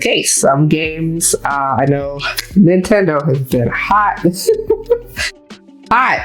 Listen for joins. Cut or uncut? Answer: uncut